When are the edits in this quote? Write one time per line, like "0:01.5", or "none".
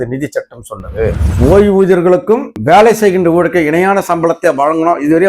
0:01.2